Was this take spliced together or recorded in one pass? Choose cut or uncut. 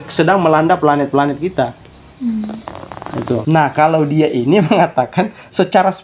cut